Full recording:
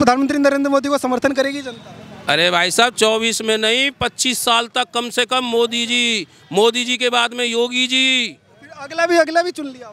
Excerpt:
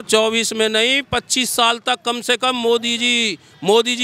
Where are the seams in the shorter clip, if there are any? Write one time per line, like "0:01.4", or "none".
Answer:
none